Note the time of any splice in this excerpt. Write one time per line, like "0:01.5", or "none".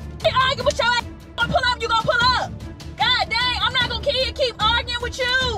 none

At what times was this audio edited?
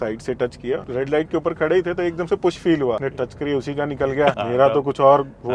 0:00.9
0:03.1
0:04.4

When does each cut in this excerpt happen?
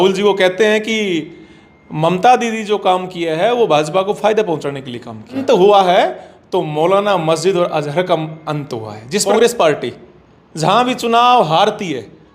0:05.4
0:09.2

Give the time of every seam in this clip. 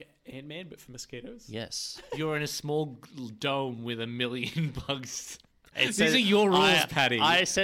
0:02.2
0:05.7

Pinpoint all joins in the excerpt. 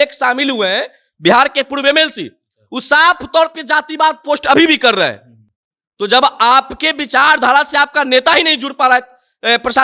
none

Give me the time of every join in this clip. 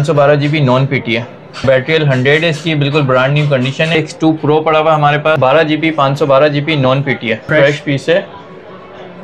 0:01.6
0:03.9
0:05.4
0:07.5

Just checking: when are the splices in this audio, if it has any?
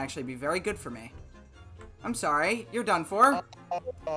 none

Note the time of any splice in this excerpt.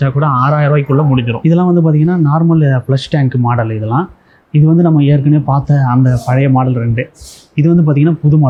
none

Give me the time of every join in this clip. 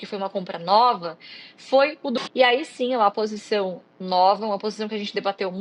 0:02.1

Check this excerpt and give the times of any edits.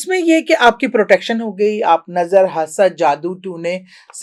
none

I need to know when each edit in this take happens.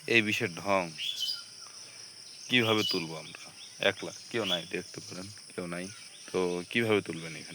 0:06.1

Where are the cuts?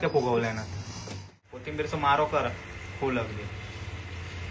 0:01.6

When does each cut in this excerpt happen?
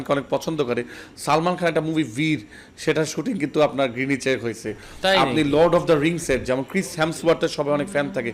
none

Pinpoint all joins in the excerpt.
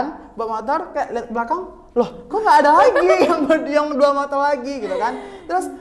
none

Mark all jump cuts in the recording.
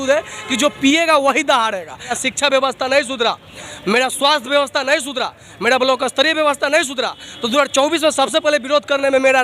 0:02.2

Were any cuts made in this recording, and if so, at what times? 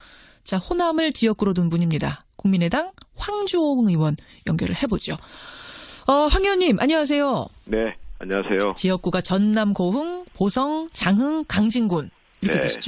0:04.7

